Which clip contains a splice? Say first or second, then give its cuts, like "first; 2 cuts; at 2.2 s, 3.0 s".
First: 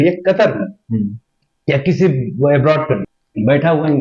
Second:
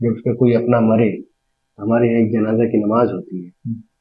first; 1 cut; at 3.1 s